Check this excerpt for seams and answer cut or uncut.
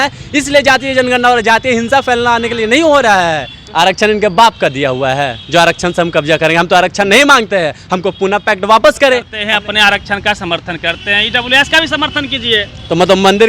cut